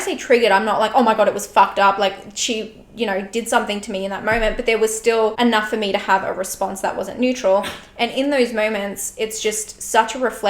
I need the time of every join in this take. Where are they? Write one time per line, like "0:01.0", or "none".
0:05.3